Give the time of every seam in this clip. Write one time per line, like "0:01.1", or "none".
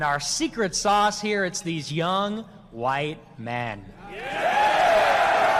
none